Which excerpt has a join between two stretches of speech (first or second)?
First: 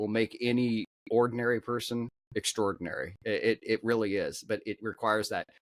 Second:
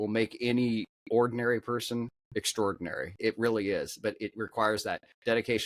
second